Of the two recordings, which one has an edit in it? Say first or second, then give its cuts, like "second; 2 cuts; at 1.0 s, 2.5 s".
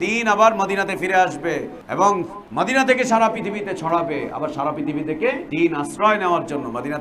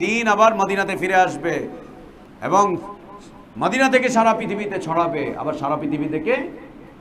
first; 3 cuts; at 1.8 s, 2.4 s, 5.4 s